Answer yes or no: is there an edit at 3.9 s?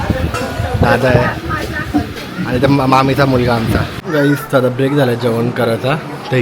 yes